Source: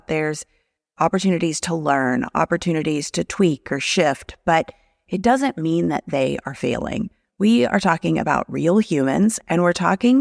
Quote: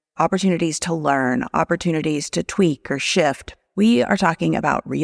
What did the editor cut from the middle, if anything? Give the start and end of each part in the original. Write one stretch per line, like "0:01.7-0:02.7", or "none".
0:04.3-0:07.1